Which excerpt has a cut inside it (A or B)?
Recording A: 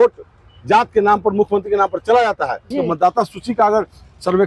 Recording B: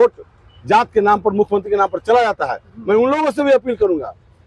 A